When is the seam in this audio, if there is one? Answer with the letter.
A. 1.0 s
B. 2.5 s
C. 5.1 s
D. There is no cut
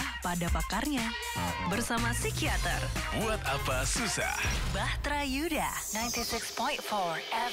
D